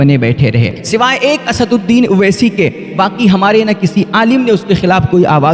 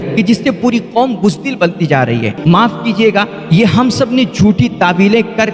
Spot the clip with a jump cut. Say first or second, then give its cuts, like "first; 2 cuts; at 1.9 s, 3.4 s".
second; 1 cut; at 2.4 s